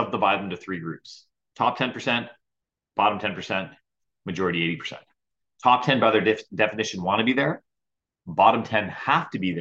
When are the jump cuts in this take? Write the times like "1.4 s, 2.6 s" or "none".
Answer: none